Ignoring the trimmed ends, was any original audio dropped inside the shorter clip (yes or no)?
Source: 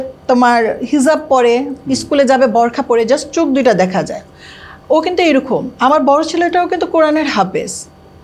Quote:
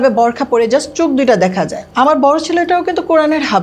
yes